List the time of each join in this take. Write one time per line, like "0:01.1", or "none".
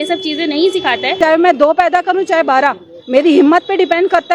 0:01.1